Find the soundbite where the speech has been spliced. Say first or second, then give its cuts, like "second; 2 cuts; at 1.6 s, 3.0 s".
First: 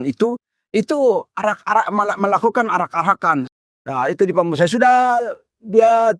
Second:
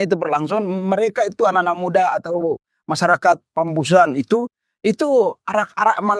first; 1 cut; at 3.5 s